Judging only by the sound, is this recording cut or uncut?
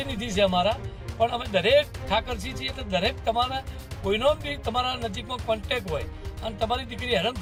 uncut